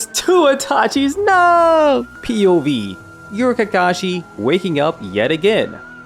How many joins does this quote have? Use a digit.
1